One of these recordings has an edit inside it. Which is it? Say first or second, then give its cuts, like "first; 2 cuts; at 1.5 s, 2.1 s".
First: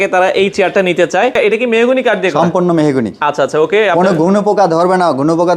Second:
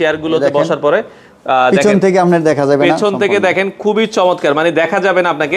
first; 1 cut; at 1.3 s